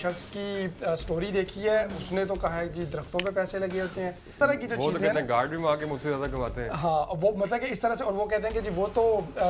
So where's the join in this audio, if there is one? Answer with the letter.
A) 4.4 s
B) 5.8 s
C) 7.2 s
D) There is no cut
A